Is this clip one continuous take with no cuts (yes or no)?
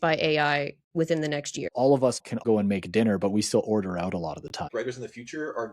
no